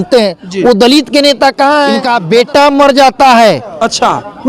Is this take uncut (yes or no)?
no